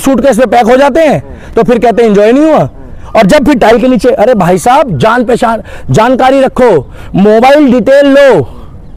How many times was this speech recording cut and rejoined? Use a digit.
0